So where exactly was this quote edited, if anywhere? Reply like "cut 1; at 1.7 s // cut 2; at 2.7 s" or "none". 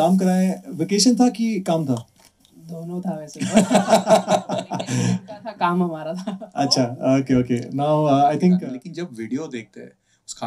cut 1; at 8.6 s